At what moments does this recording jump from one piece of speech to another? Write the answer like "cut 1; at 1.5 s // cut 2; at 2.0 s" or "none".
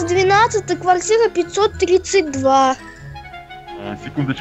none